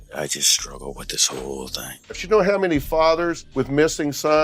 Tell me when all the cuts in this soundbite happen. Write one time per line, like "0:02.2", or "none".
0:02.2
0:03.4

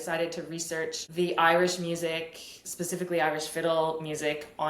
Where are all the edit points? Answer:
0:01.0

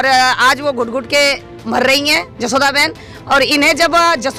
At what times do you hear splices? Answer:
none

